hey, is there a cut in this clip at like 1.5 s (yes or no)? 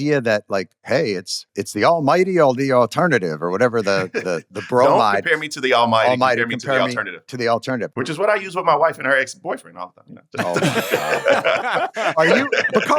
yes